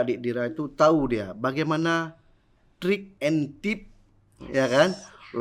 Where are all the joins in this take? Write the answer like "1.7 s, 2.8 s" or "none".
3.1 s